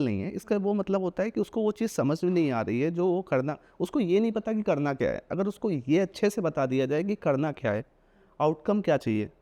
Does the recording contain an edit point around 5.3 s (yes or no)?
no